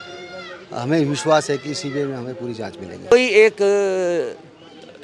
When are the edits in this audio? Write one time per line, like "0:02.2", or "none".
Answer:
0:03.1